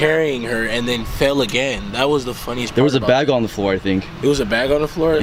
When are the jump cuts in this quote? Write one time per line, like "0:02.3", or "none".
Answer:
none